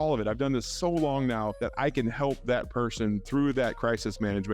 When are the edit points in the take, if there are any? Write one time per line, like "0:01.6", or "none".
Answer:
0:01.6
0:03.2